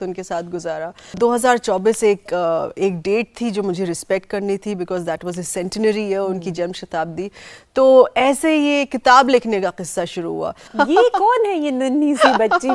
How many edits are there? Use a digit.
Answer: 2